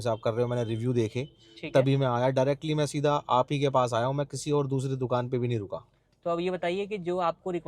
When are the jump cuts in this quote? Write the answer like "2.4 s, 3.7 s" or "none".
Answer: none